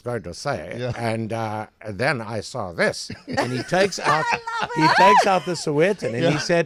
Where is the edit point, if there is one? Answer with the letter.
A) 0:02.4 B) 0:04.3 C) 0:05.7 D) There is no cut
D